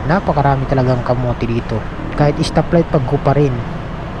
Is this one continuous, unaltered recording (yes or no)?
no